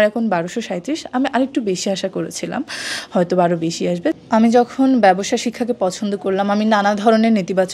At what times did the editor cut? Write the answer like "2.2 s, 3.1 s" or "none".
4.2 s